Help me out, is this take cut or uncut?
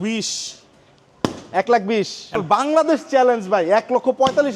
cut